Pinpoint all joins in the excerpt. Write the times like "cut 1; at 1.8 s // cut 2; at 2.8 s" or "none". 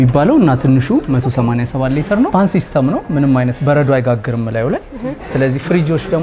none